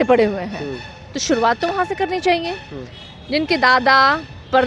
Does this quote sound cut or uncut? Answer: uncut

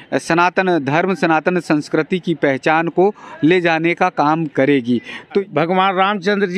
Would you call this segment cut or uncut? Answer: cut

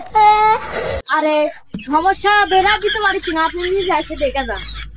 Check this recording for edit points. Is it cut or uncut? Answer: cut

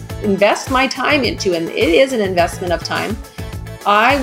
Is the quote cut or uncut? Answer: uncut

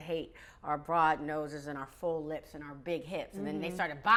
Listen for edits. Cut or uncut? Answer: uncut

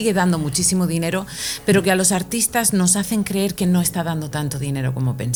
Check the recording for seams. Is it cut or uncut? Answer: uncut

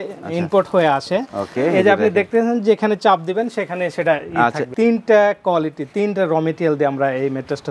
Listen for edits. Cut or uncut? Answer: cut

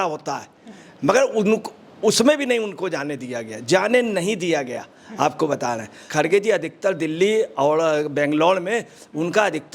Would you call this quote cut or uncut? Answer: cut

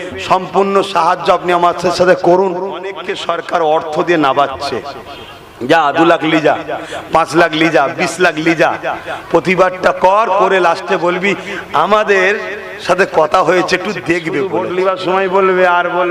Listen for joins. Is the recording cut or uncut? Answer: cut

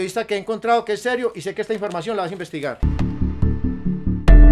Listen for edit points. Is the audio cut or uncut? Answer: cut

